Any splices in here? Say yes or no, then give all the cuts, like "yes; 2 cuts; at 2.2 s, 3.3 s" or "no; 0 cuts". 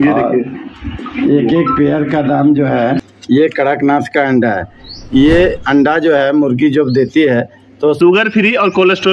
yes; 2 cuts; at 3.0 s, 8.0 s